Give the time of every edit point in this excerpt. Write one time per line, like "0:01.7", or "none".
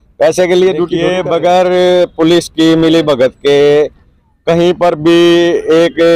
0:01.1